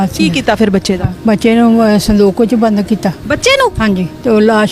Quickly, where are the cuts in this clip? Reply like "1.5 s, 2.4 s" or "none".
1.1 s, 3.8 s